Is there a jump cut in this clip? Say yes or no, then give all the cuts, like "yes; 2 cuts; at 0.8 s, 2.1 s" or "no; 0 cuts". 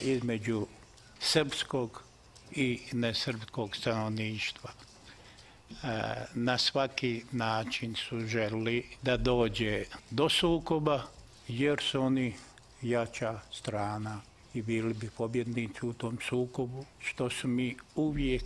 yes; 1 cut; at 16.4 s